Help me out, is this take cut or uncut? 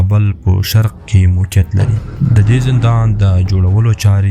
cut